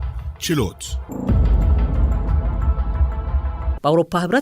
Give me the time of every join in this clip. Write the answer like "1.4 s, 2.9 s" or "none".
0.9 s, 3.7 s